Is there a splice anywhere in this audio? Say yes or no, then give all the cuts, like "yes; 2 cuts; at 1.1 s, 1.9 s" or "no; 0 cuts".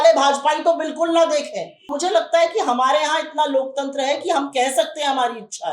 yes; 1 cut; at 1.9 s